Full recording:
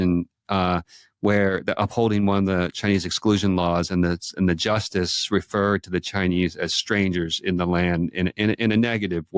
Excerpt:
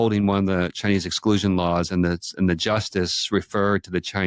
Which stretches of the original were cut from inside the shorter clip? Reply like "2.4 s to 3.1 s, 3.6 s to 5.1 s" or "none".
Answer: none